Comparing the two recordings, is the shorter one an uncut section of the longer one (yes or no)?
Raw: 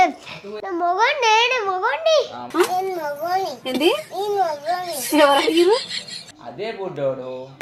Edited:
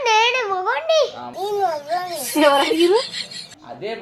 no